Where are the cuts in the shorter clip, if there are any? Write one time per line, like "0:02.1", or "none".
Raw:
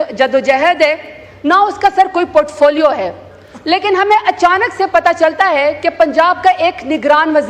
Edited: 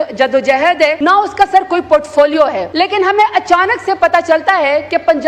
0:01.0
0:02.6